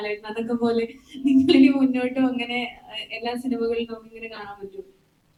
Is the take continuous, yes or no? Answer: yes